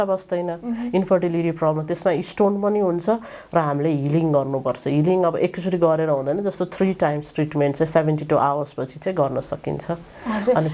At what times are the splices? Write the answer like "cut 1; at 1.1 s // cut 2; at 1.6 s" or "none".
none